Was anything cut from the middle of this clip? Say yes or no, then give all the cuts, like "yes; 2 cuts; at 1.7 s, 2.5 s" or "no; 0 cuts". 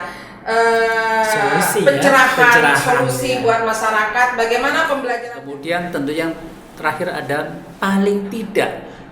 yes; 1 cut; at 5.2 s